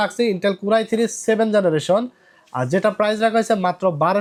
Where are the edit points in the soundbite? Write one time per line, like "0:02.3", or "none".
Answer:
none